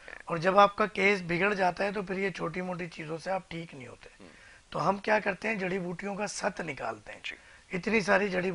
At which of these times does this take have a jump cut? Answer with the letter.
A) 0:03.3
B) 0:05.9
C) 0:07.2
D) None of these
D